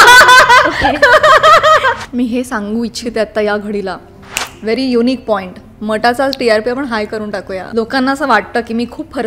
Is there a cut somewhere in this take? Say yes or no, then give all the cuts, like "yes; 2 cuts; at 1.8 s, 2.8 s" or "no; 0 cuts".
yes; 2 cuts; at 2.0 s, 7.6 s